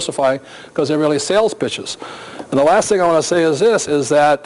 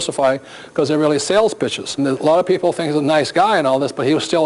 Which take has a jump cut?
first; 1 cut; at 1.8 s

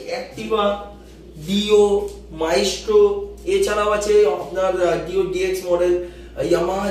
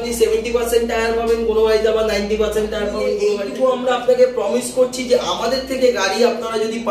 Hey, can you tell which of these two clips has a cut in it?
second; 1 cut; at 3.4 s

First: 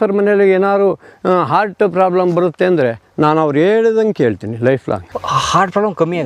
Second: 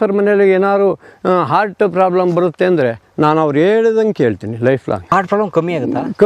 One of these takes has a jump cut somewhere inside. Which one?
second; 1 cut; at 5.0 s

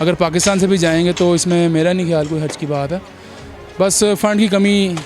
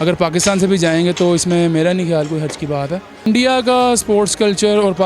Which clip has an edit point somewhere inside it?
second; 1 cut; at 3.2 s

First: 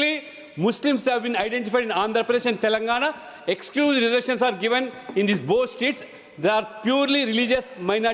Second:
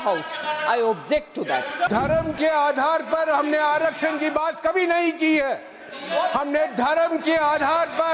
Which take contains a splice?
second; 1 cut; at 1.9 s

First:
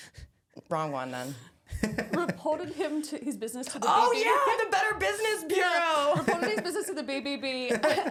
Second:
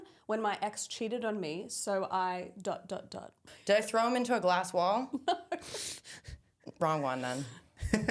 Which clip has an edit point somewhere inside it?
second; 1 cut; at 3.5 s

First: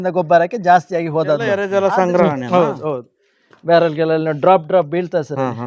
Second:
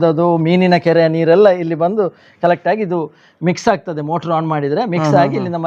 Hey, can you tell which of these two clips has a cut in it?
first; 1 cut; at 1.6 s

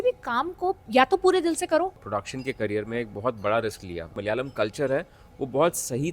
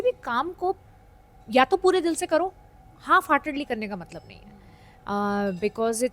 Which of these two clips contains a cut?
first; 3 cuts; at 0.8 s, 2.0 s, 4.2 s

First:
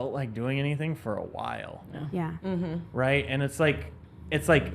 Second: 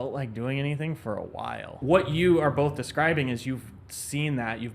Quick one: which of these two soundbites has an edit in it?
second; 1 cut; at 1.7 s

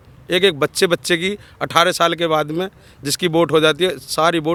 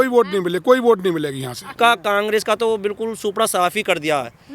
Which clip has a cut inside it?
second; 1 cut; at 1.7 s

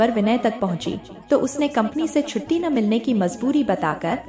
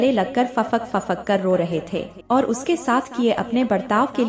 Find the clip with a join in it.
second; 1 cut; at 2.1 s

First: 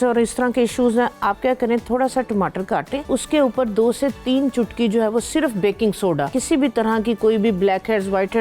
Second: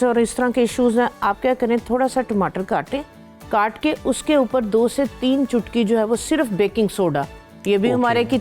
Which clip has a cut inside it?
first; 2 cuts; at 3.0 s, 6.4 s

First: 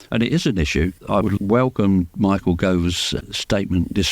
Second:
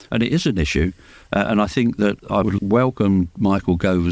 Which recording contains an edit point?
first; 2 cuts; at 1.0 s, 3.1 s

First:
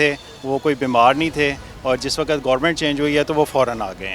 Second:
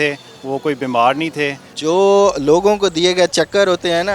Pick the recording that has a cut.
second; 1 cut; at 1.7 s

